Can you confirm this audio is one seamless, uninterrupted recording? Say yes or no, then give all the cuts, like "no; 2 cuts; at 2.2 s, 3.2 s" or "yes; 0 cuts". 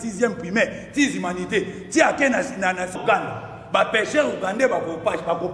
no; 1 cut; at 3.0 s